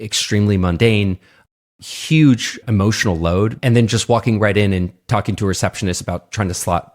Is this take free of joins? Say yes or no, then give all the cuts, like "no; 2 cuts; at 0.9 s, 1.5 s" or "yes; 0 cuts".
no; 1 cut; at 3.6 s